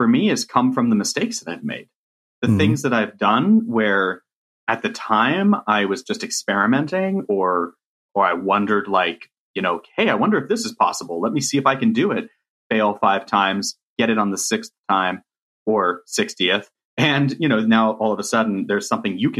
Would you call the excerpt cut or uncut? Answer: uncut